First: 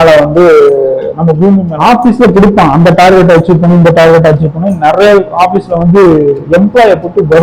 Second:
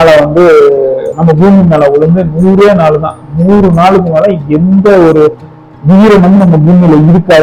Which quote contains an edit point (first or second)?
first